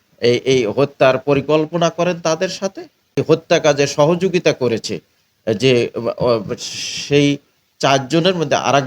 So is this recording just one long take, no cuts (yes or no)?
no